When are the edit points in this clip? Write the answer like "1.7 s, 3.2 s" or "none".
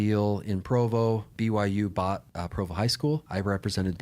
1.3 s, 2.4 s, 3.3 s